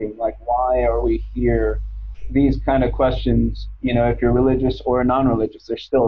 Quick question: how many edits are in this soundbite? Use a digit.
1